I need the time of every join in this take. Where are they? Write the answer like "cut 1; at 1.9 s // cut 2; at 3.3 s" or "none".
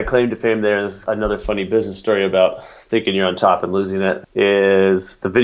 cut 1; at 1.0 s // cut 2; at 4.2 s